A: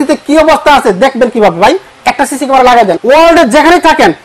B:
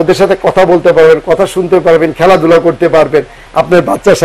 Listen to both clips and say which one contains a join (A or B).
A